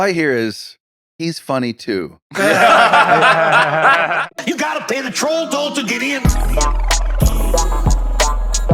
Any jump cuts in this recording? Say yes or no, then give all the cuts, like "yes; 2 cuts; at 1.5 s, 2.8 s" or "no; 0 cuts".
yes; 1 cut; at 4.2 s